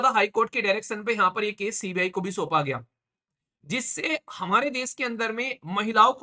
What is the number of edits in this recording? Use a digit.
1